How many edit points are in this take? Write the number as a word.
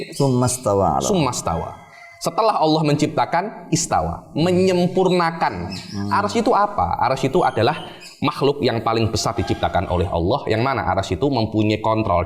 one